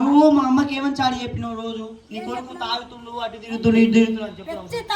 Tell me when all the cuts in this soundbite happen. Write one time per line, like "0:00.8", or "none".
none